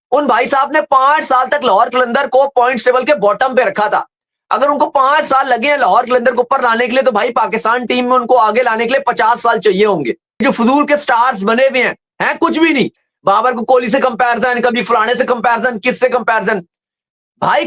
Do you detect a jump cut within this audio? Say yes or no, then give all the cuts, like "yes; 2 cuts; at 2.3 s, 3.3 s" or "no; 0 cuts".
yes; 1 cut; at 10.4 s